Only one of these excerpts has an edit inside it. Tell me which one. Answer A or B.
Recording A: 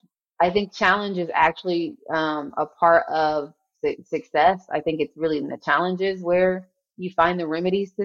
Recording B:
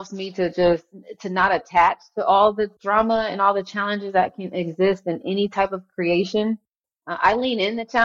B